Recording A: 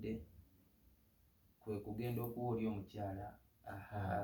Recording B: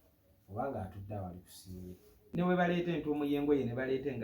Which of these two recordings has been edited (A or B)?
B